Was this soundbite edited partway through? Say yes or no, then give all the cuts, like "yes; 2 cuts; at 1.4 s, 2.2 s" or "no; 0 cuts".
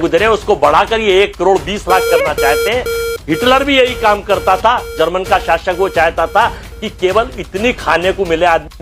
no; 0 cuts